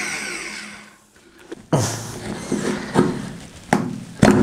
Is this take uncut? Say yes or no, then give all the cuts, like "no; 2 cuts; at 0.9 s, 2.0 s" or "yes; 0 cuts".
yes; 0 cuts